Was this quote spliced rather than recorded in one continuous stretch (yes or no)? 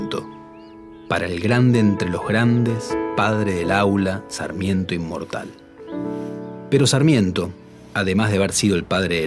yes